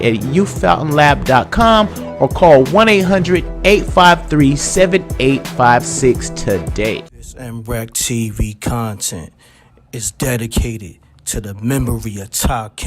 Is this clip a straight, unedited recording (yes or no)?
no